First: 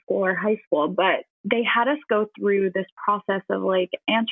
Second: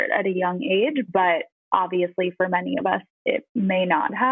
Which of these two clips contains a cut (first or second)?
second